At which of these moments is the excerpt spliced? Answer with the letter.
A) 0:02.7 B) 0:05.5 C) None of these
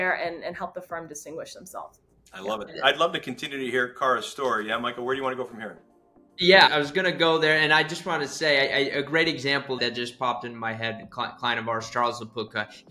A